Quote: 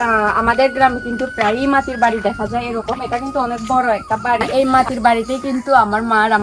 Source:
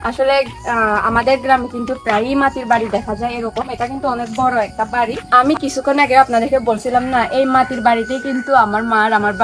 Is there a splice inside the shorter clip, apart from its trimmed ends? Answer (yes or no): yes